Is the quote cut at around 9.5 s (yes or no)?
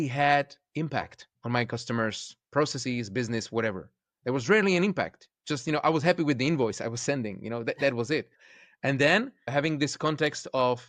yes